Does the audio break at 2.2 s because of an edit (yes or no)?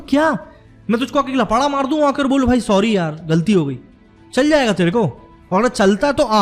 no